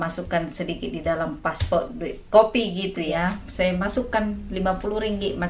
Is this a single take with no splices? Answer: no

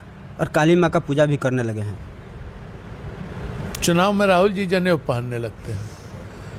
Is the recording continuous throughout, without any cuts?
yes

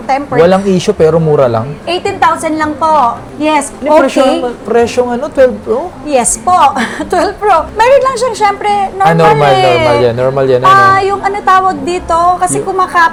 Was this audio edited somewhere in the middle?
no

